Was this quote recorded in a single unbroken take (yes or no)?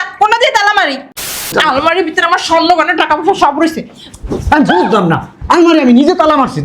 no